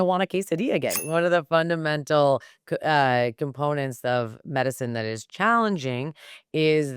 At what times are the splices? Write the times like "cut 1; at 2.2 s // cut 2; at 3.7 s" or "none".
cut 1; at 1.0 s